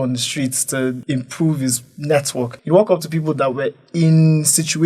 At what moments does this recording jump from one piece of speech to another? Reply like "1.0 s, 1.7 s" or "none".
1.0 s, 2.6 s

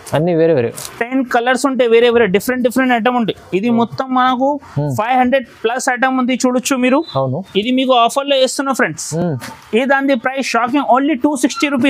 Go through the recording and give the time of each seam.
none

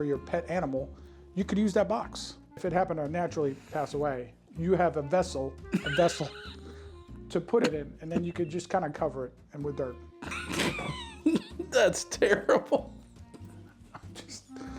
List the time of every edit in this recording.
2.6 s, 10.4 s

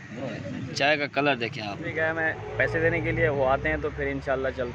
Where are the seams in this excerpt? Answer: 1.9 s

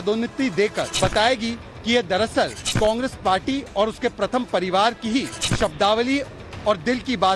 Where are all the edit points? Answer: 0.8 s, 2.6 s, 5.4 s

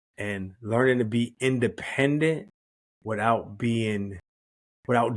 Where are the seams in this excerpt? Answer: none

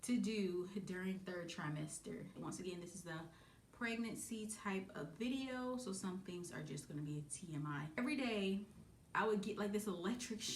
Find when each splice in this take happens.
2.3 s, 8.0 s

